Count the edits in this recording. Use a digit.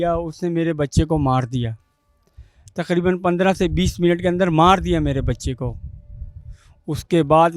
0